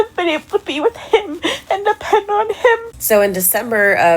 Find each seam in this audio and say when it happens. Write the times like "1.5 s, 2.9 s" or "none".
2.9 s